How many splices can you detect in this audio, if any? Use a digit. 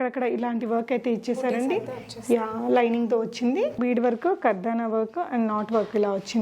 1